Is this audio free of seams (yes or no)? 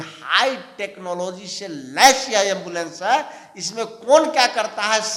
yes